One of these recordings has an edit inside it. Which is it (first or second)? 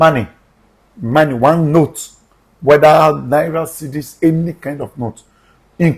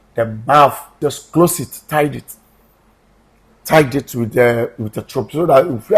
second